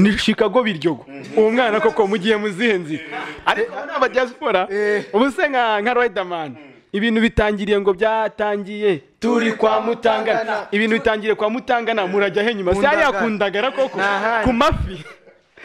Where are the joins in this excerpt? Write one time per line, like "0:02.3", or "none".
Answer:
none